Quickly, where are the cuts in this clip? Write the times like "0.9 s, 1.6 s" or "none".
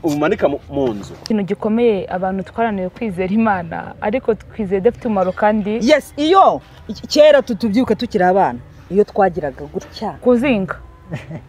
1.2 s